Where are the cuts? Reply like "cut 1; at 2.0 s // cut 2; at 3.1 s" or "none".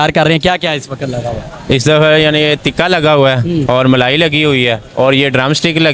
none

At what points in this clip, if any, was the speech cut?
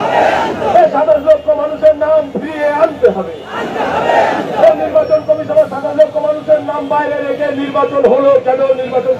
none

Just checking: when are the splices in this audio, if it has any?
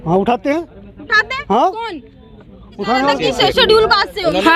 cut 1; at 3.2 s

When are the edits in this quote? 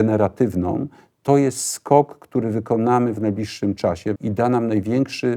cut 1; at 4.2 s

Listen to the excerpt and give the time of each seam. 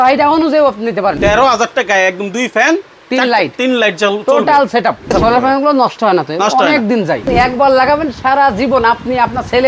cut 1; at 1.2 s // cut 2; at 5.1 s // cut 3; at 7.3 s

